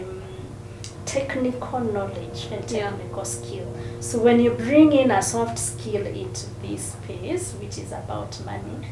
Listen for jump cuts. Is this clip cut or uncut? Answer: uncut